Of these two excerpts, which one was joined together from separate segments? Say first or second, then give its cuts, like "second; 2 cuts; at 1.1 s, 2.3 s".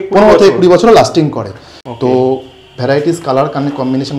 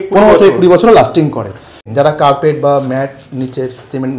second; 1 cut; at 1.9 s